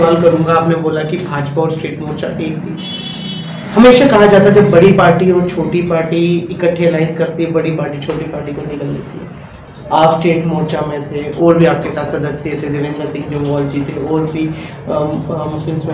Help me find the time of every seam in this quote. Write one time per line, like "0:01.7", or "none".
none